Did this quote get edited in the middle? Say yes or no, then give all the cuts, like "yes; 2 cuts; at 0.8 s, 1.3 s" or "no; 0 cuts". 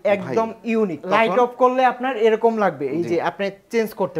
yes; 1 cut; at 1.0 s